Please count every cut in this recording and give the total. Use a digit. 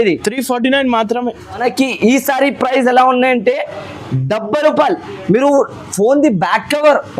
1